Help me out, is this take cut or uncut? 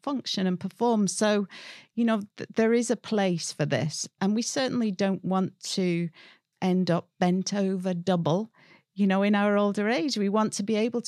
uncut